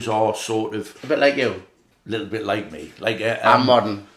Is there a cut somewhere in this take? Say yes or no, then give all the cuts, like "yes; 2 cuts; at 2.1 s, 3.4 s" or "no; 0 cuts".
no; 0 cuts